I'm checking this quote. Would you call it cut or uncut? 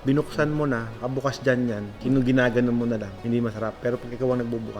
cut